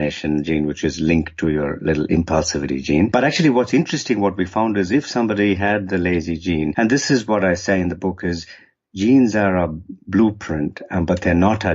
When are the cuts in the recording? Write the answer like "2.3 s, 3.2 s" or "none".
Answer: 3.1 s, 6.7 s

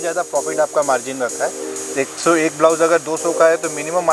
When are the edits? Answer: none

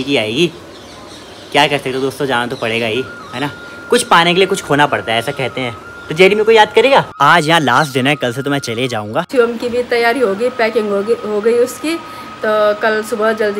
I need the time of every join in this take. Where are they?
7.1 s, 9.3 s

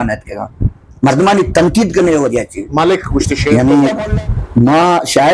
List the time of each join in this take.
3.5 s

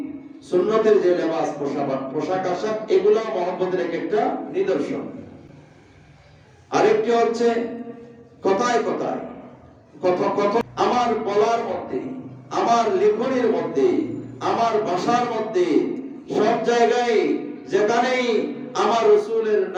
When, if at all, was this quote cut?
none

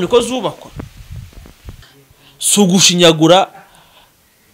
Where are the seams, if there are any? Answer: 1.9 s

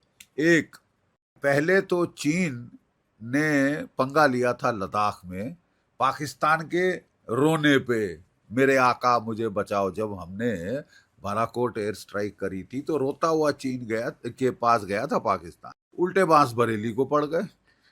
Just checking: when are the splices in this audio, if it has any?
1.4 s, 15.8 s

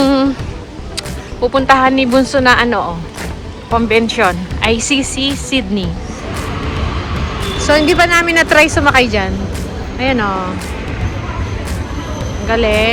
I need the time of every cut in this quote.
6.1 s

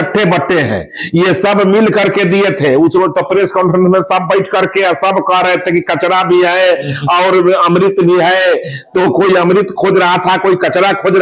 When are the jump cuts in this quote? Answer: none

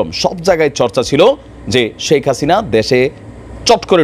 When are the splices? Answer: none

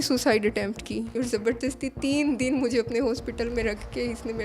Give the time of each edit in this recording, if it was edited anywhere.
1.1 s

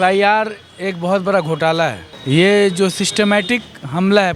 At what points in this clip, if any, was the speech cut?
none

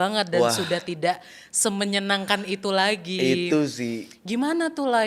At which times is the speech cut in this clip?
none

